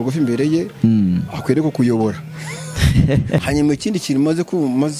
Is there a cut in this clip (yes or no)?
yes